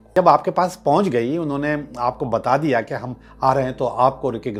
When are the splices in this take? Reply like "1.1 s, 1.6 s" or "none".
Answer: none